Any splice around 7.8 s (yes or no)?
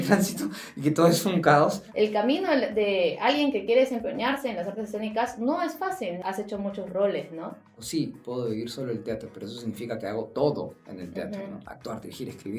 yes